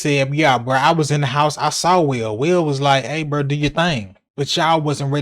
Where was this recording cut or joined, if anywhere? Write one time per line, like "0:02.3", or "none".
0:04.2